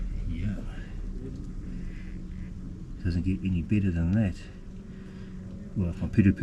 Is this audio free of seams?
yes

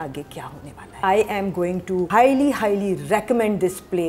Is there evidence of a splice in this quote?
yes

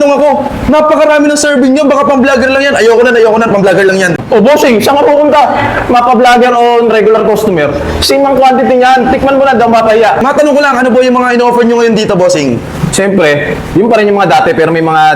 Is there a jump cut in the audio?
no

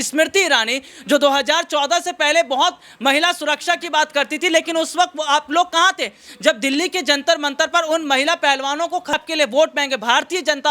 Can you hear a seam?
yes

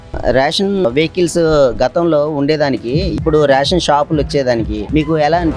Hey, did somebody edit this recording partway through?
no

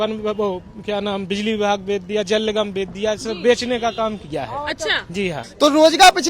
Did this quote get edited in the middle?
yes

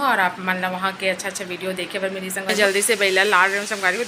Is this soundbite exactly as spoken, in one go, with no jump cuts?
no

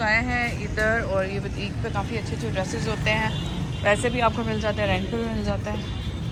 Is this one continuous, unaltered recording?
yes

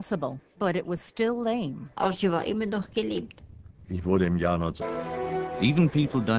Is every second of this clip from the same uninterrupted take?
yes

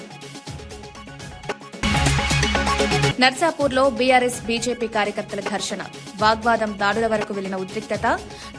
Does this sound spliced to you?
yes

